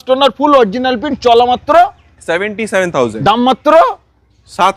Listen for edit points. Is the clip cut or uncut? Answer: uncut